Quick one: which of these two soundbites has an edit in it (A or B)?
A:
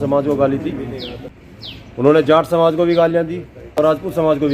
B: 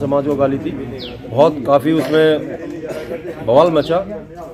A